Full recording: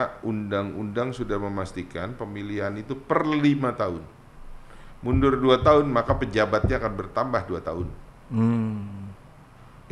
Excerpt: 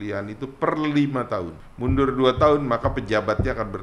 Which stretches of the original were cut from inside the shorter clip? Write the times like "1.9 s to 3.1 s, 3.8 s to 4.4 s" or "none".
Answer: 4.1 s to 4.9 s